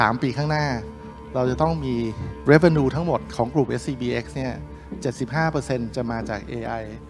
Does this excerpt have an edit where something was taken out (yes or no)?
yes